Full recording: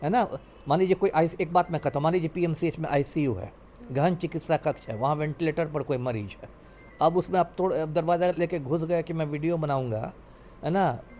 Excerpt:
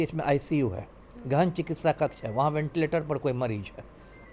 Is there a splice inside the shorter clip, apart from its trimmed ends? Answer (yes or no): no